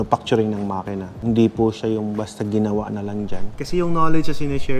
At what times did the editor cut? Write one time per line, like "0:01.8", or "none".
0:01.1
0:03.4